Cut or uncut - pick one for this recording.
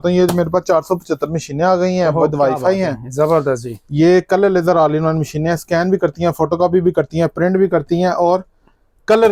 uncut